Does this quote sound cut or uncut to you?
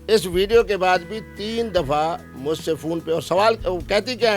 uncut